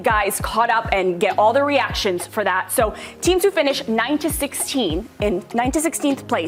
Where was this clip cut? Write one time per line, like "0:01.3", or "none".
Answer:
none